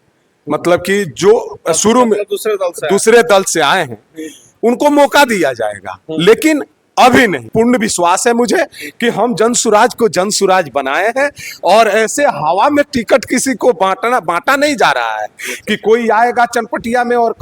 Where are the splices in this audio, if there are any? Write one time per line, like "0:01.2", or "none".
0:07.5